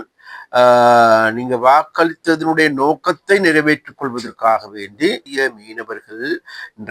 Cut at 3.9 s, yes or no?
no